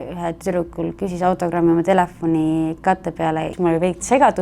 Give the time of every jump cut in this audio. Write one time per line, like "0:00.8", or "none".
0:03.5